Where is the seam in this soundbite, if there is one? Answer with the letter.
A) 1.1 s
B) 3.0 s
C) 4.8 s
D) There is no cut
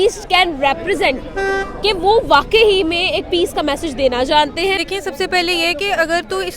C